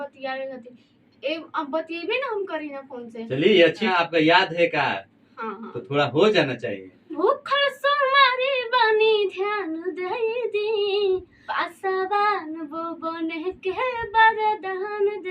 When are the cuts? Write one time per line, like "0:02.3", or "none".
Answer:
0:03.9
0:07.2
0:11.4